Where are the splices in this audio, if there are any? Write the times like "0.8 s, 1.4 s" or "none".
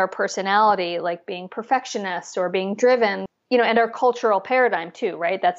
3.2 s